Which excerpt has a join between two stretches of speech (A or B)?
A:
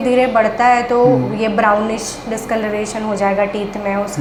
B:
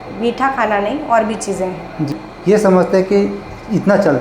B